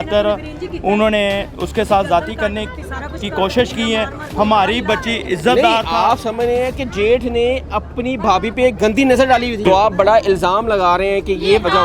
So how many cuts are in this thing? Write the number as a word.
one